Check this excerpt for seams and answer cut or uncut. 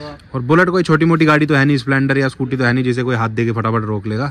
uncut